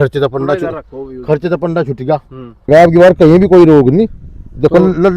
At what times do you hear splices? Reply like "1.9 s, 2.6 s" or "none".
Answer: 2.7 s